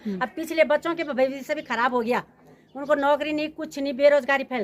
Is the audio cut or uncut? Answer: uncut